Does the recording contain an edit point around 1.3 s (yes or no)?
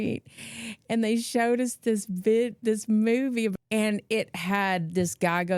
no